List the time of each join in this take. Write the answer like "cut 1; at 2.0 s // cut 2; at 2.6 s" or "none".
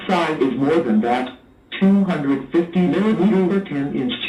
none